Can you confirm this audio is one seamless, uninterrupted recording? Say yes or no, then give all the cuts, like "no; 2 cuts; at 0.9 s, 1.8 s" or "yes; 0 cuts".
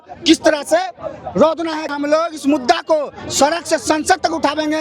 no; 1 cut; at 1.9 s